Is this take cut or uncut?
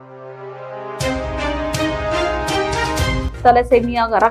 uncut